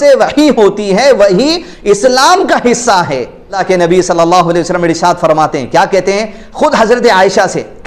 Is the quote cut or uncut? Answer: cut